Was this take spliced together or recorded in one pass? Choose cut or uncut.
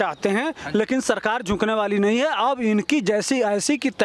uncut